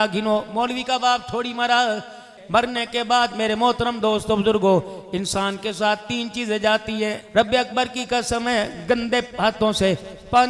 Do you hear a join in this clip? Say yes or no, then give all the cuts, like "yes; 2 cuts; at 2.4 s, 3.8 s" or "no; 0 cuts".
yes; 2 cuts; at 2.3 s, 7.2 s